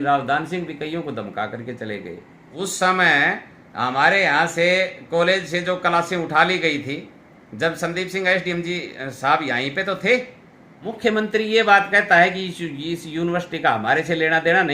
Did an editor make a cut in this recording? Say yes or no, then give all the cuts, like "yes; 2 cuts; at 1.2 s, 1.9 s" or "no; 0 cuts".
yes; 2 cuts; at 2.4 s, 10.8 s